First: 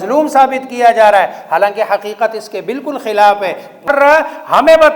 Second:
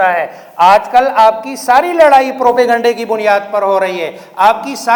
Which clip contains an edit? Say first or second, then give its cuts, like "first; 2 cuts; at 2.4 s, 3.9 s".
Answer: first; 1 cut; at 3.9 s